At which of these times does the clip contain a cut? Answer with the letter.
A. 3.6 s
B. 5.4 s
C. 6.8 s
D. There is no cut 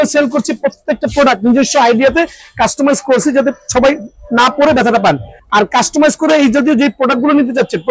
B